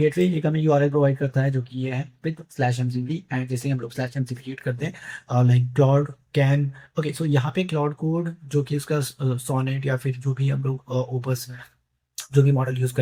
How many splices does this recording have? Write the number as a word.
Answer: zero